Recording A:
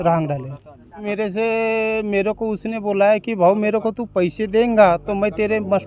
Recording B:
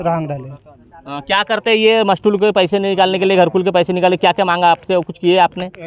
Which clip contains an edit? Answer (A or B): A